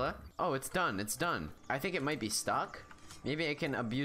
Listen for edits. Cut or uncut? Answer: cut